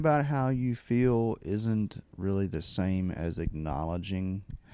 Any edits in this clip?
no; 0 cuts

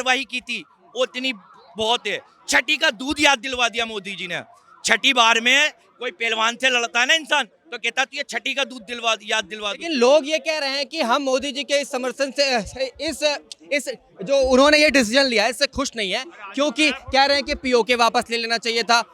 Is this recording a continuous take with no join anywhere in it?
yes; 0 cuts

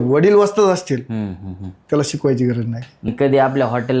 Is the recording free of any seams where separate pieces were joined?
no; 1 cut; at 3.1 s

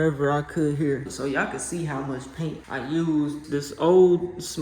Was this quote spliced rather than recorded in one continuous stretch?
yes; 2 cuts; at 1.1 s, 2.6 s

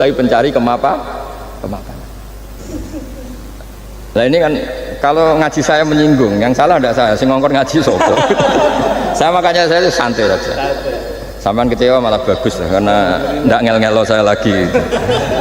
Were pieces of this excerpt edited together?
yes; 1 cut; at 2.6 s

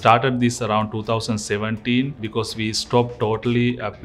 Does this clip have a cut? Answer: yes; 1 cut; at 2.2 s

